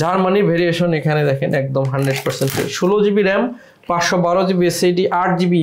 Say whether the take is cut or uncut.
uncut